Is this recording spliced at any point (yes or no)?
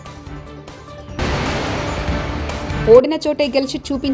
yes